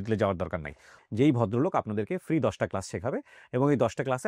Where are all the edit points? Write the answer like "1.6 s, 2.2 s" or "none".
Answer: 0.9 s